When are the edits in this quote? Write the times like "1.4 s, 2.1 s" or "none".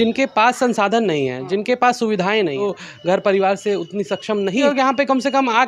2.7 s, 4.6 s